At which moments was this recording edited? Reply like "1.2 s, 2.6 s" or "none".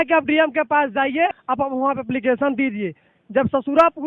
1.3 s